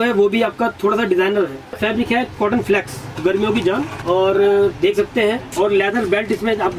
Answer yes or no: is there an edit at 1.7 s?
yes